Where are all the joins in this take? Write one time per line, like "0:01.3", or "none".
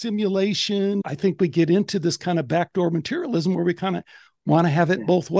0:01.0